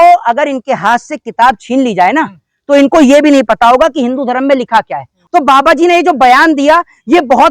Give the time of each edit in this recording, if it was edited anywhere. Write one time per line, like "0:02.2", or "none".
0:05.2